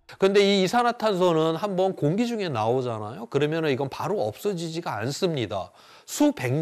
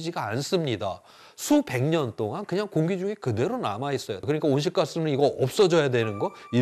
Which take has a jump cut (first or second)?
second